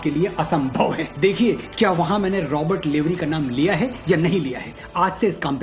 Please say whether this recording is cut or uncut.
cut